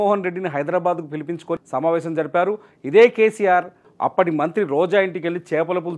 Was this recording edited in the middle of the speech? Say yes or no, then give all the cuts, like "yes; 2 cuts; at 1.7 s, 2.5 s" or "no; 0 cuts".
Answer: yes; 2 cuts; at 1.6 s, 3.9 s